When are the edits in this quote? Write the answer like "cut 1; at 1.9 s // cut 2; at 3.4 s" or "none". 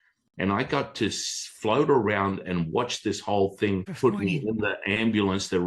cut 1; at 3.9 s